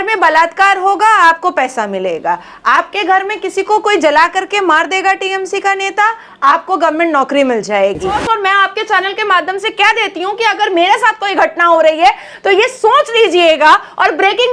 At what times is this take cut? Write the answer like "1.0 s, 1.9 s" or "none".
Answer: 8.2 s